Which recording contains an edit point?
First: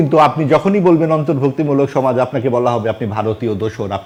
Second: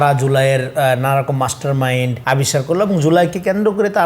second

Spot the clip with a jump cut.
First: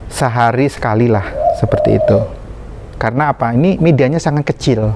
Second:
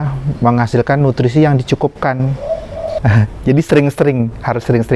second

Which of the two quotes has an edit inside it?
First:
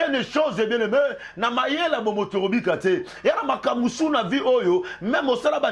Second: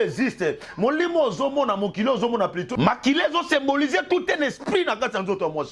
second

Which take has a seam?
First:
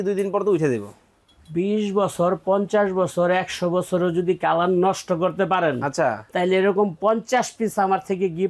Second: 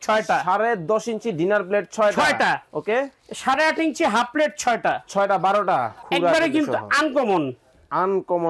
second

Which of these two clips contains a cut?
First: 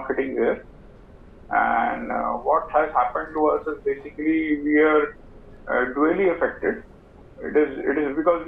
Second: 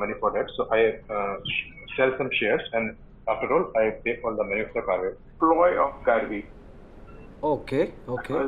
second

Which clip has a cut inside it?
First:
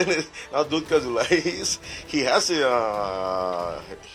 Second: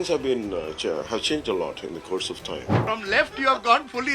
second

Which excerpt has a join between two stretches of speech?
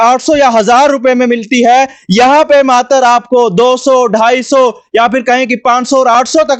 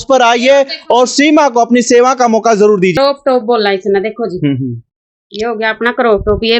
second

